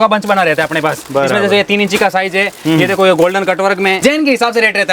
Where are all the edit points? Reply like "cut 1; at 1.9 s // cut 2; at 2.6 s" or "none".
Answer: cut 1; at 4.0 s